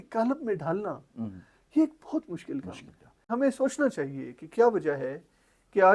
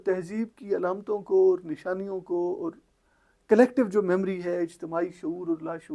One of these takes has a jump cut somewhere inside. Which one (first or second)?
first